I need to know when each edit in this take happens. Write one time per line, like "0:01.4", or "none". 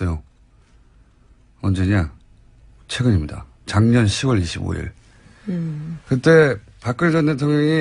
none